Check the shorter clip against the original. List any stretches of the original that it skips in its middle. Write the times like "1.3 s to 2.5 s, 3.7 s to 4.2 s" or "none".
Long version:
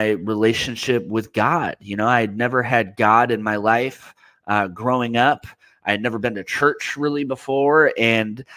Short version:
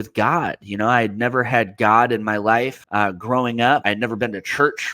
4.0 s to 4.4 s, 5.4 s to 5.9 s